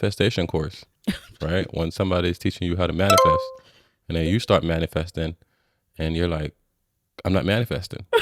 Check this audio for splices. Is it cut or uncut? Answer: uncut